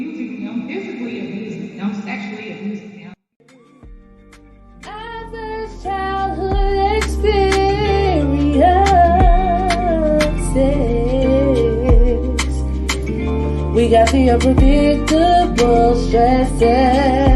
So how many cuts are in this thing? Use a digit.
1